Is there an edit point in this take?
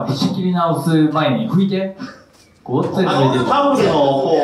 no; 0 cuts

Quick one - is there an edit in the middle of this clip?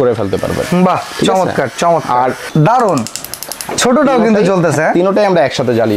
yes; 1 cut; at 2.4 s

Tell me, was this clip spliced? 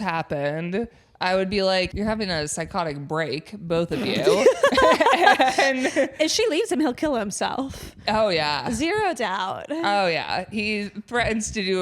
yes; 1 cut; at 1.9 s

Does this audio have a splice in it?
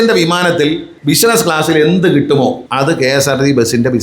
yes; 2 cuts; at 0.9 s, 2.6 s

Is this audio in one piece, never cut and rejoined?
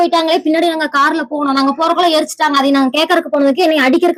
yes; 0 cuts

